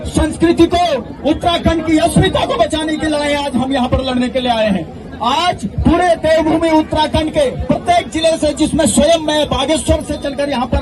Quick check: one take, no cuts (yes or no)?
yes